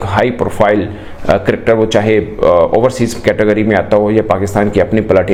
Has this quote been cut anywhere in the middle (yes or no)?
no